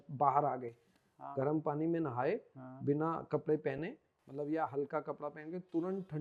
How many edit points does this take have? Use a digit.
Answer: 0